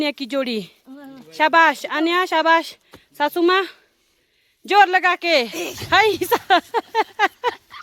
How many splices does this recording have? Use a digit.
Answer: 0